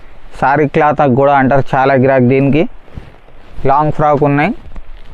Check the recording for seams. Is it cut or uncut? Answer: uncut